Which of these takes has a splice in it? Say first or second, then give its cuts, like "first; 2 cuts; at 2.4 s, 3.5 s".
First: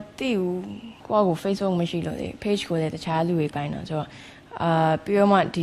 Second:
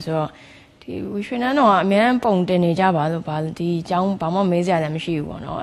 first; 1 cut; at 1.0 s